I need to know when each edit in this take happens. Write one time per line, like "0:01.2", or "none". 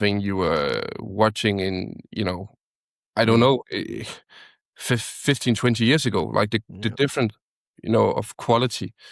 none